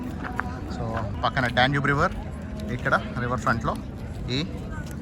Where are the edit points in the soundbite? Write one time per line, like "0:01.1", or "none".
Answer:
0:01.1